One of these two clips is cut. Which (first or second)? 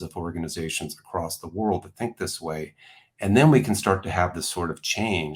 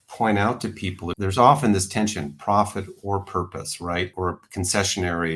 second